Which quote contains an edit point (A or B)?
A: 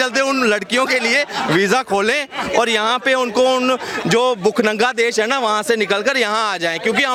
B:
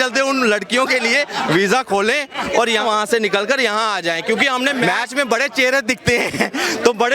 B